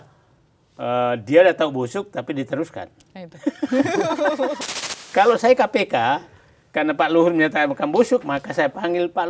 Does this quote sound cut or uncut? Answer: cut